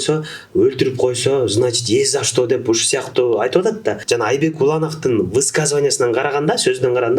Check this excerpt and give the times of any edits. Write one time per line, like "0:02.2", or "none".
0:04.0